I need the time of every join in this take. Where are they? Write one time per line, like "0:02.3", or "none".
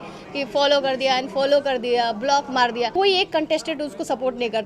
0:02.9